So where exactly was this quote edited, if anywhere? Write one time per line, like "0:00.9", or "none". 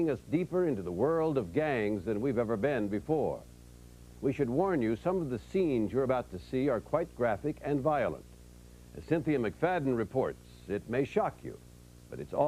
0:07.0